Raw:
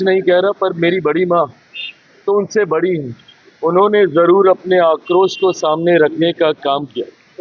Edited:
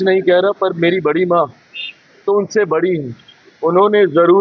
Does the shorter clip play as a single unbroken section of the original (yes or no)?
yes